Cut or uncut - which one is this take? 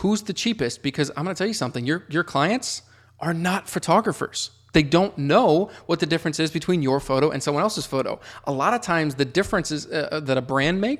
uncut